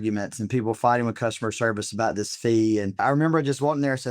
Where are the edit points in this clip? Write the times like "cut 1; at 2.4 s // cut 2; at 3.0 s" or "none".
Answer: cut 1; at 3.0 s